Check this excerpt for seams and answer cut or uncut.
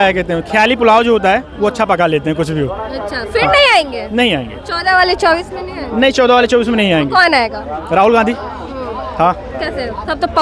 uncut